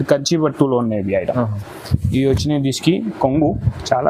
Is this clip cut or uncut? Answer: uncut